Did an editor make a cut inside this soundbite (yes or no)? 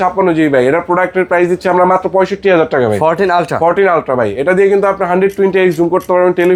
no